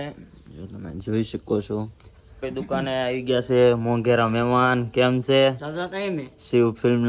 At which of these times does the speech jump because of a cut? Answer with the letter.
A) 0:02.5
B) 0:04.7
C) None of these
A